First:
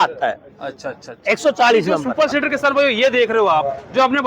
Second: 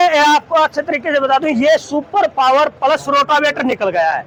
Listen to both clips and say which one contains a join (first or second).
first